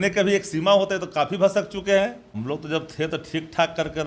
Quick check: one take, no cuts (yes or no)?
no